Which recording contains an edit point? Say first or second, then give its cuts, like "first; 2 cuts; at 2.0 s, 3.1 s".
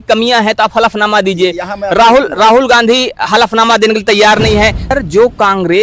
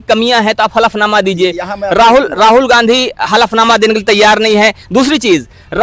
first; 1 cut; at 4.9 s